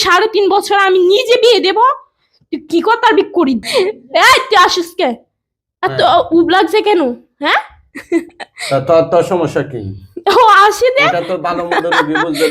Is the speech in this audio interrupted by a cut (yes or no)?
yes